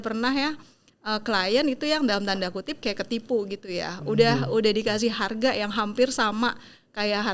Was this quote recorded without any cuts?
yes; 0 cuts

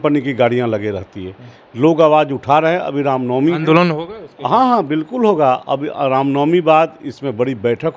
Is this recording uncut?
yes; 0 cuts

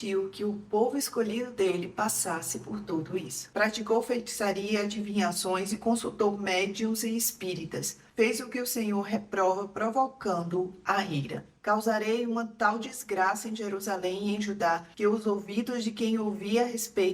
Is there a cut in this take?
yes; 2 cuts; at 3.4 s, 11.6 s

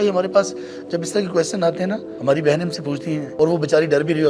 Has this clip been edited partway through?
yes; 2 cuts; at 2.1 s, 3.3 s

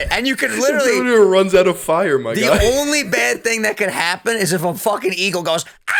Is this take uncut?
yes; 0 cuts

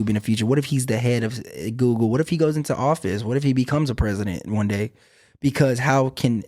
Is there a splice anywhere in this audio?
no; 0 cuts

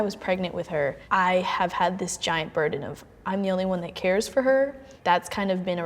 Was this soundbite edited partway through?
yes; 1 cut; at 1.0 s

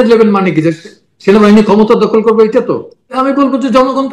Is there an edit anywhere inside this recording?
yes; 1 cut; at 3.1 s

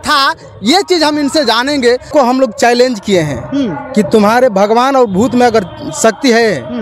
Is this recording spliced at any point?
yes; 1 cut; at 2.1 s

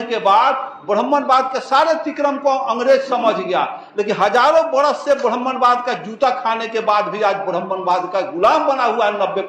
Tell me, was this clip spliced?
no; 0 cuts

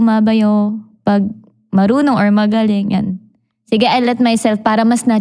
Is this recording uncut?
yes; 0 cuts

